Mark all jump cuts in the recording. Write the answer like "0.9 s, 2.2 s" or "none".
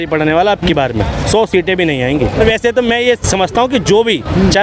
2.4 s